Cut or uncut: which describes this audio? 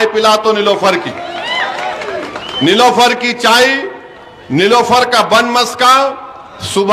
uncut